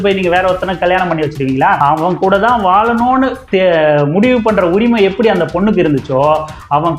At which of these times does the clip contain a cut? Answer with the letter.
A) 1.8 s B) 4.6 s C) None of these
A